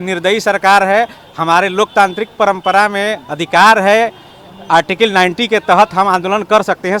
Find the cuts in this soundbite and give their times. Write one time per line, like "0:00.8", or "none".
none